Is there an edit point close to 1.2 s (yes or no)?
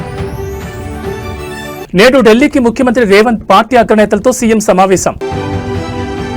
no